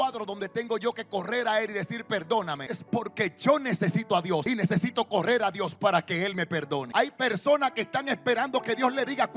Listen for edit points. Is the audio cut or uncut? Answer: cut